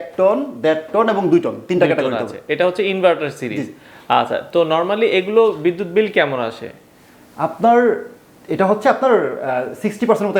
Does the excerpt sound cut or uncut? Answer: uncut